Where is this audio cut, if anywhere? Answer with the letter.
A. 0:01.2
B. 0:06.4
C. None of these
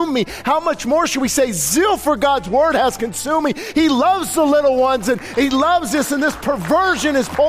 C